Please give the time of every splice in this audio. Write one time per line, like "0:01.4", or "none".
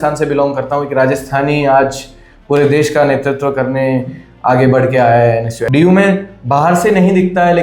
0:05.6